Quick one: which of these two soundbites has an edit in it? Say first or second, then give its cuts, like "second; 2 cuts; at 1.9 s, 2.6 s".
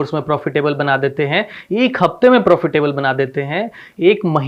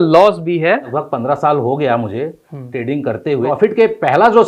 second; 2 cuts; at 1.0 s, 3.5 s